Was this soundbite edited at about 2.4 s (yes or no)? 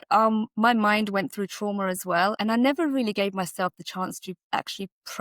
yes